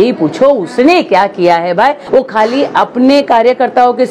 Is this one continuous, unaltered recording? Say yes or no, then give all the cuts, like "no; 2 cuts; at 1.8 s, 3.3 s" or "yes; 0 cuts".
no; 1 cut; at 2.0 s